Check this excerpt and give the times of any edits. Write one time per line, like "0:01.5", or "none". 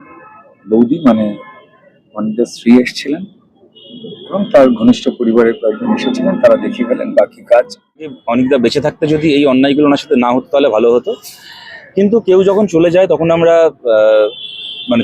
0:08.2